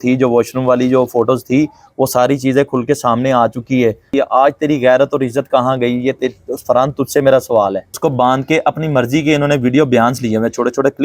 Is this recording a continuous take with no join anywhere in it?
no; 2 cuts; at 4.1 s, 7.9 s

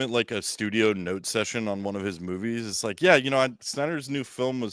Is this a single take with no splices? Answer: yes; 0 cuts

